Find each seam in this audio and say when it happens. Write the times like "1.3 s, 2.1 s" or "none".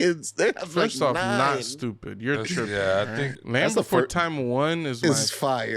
3.4 s, 5.0 s